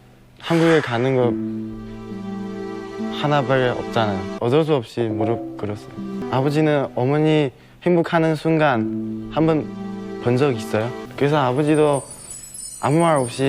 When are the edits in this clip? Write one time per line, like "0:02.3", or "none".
0:04.3
0:06.2
0:11.0

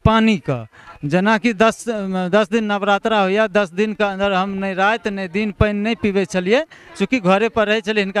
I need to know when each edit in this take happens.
none

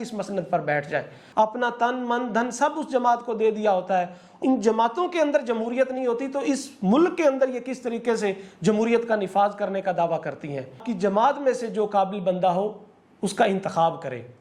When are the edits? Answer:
0:01.2
0:04.3
0:10.9

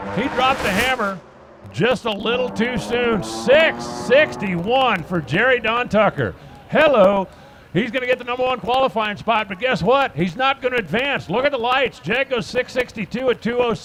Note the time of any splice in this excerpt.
none

